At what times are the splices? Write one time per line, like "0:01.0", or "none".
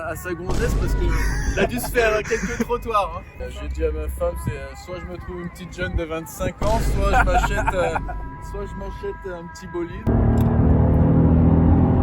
0:03.3
0:10.1